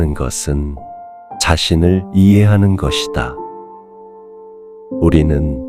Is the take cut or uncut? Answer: uncut